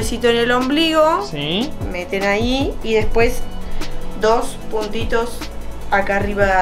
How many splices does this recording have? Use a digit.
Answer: 0